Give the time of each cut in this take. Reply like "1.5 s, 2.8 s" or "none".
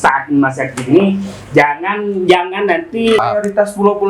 3.2 s